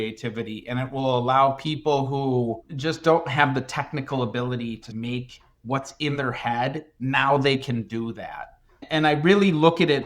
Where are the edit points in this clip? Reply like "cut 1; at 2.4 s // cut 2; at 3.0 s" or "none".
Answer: cut 1; at 2.7 s // cut 2; at 4.9 s